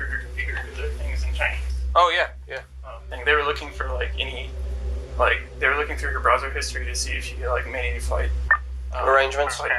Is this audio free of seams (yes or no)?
yes